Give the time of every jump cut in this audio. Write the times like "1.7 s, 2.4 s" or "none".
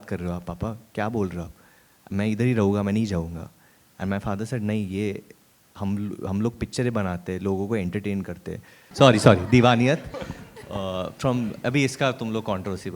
8.8 s

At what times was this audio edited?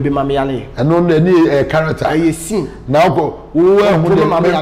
none

